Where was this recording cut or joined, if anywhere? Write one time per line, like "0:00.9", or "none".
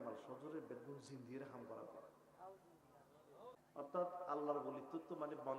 0:03.6